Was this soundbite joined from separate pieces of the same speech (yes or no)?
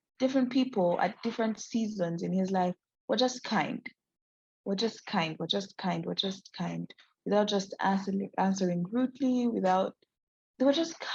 no